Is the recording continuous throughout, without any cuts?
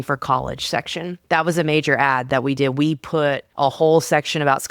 no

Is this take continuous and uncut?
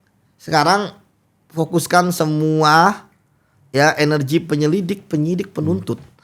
yes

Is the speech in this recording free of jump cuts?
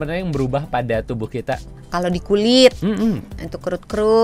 no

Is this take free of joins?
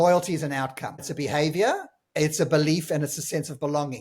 no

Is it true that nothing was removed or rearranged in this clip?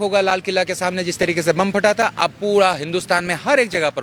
yes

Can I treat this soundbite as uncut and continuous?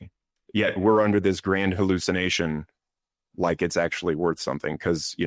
yes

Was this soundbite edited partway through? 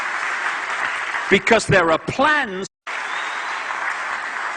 no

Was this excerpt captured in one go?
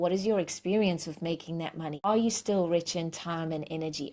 no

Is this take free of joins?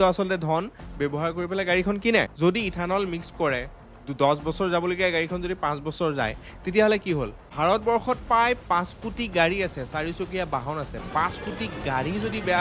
no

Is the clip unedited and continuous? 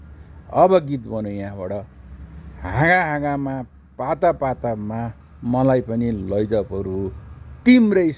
yes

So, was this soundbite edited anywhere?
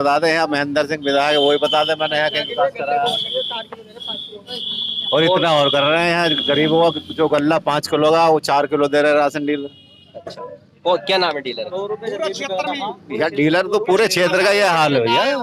no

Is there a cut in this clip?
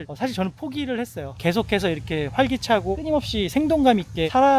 yes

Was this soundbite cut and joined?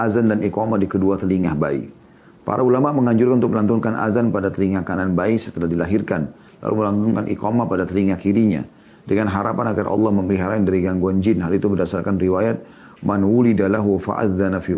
no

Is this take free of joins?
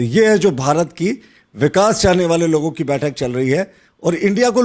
yes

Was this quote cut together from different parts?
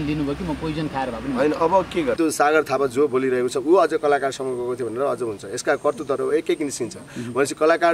yes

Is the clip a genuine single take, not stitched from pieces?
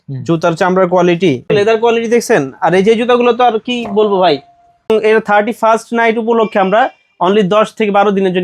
no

